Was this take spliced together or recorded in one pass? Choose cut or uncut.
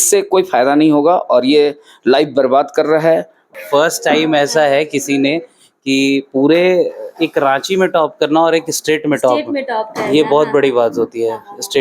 cut